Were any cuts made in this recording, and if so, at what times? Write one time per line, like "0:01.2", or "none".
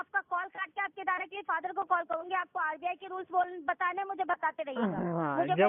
none